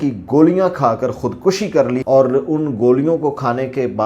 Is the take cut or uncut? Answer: cut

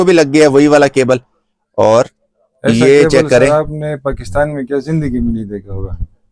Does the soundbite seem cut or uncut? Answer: uncut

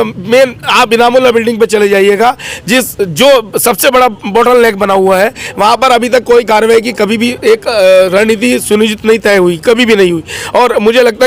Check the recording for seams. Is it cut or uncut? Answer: uncut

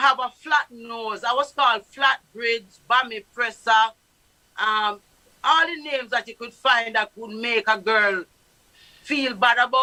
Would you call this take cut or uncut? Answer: uncut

